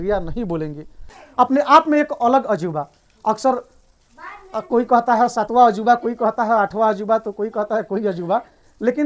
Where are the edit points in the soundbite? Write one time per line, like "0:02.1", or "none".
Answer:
0:01.2